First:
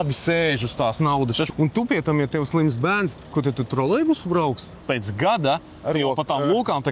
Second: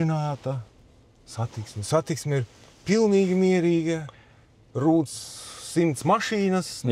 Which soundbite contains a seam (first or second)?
first